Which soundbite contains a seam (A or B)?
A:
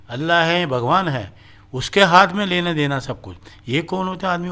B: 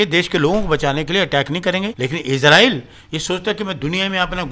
B